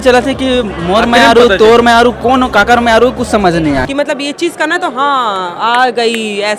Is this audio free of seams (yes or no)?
no